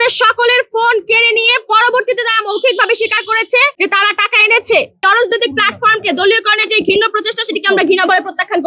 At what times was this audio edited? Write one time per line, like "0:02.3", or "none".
0:03.7
0:05.0